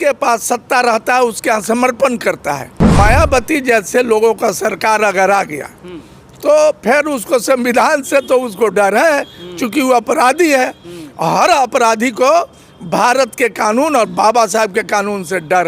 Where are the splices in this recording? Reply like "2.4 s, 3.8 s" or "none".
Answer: 2.8 s